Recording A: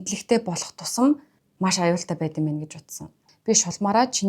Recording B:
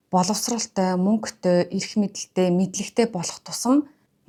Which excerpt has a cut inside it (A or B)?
A